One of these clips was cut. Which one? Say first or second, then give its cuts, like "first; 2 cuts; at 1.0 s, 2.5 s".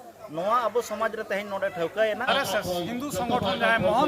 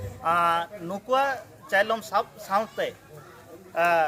first; 1 cut; at 2.3 s